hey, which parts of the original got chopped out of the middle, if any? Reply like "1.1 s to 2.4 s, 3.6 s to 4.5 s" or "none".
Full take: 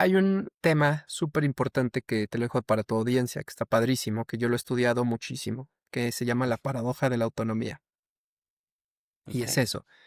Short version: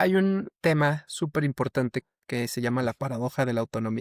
2.0 s to 5.7 s